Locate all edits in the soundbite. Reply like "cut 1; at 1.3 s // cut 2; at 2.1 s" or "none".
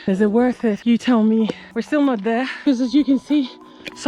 cut 1; at 0.8 s // cut 2; at 1.7 s // cut 3; at 2.5 s